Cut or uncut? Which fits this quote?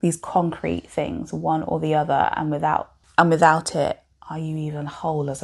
cut